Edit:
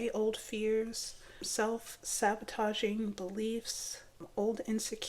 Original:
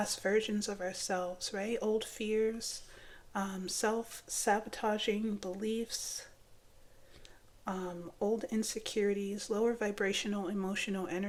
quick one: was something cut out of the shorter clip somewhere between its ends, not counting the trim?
yes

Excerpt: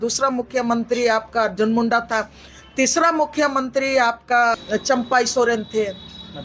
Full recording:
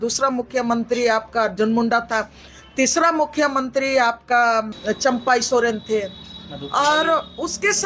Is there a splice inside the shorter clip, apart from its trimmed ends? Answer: yes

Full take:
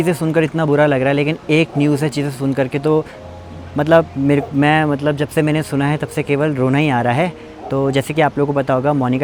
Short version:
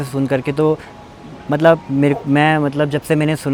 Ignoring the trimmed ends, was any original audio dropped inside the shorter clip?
no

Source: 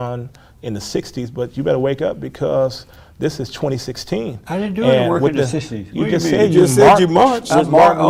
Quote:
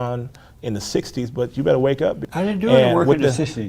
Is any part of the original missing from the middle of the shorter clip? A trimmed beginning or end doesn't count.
yes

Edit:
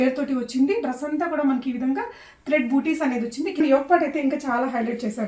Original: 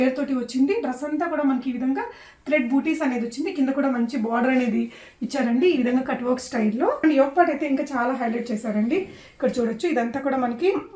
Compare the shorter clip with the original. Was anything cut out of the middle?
yes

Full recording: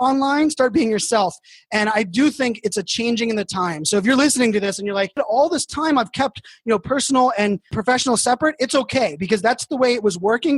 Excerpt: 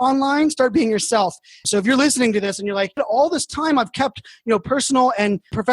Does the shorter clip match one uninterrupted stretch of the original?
no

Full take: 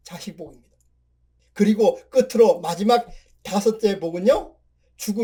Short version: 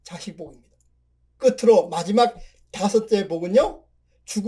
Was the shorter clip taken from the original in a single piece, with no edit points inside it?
no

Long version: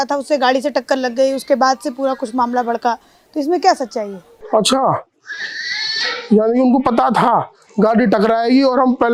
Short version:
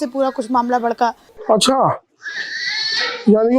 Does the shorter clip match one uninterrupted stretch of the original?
no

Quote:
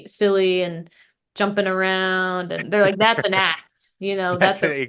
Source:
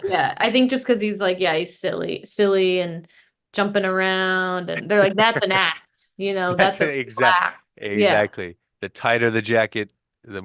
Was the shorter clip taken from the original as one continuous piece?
yes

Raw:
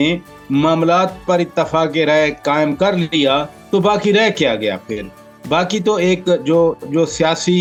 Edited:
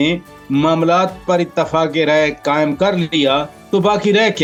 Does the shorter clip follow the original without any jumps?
yes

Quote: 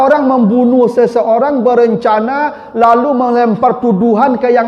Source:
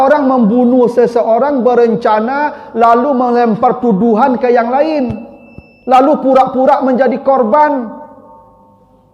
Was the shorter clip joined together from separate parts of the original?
no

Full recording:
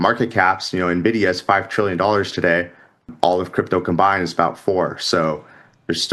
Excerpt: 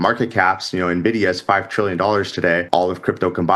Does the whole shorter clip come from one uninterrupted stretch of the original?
no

